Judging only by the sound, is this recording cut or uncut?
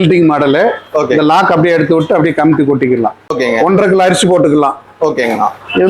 cut